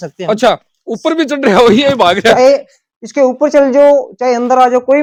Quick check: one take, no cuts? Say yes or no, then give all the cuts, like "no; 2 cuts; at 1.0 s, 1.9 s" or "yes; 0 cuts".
yes; 0 cuts